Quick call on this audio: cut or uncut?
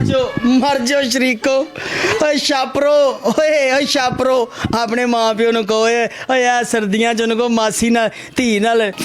uncut